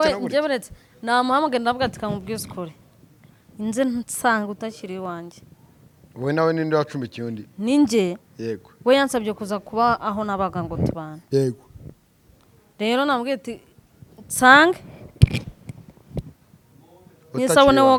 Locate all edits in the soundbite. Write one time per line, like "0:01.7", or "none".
none